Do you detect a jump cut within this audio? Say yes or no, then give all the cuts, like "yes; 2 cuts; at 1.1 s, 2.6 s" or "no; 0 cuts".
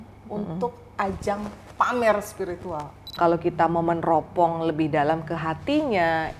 yes; 1 cut; at 3.1 s